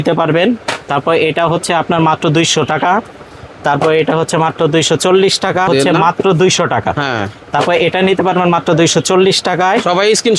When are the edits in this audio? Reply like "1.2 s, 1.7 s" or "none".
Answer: 5.7 s